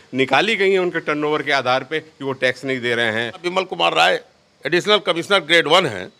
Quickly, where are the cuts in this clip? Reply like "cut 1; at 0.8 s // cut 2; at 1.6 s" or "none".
cut 1; at 3.5 s